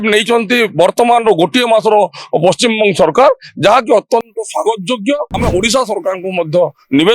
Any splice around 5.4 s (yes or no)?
yes